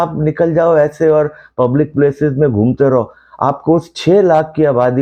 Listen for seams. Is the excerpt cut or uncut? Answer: uncut